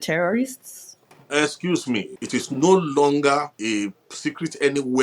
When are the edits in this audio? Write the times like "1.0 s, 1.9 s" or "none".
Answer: 2.1 s, 3.5 s